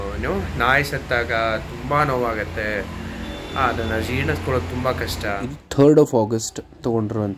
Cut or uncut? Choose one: cut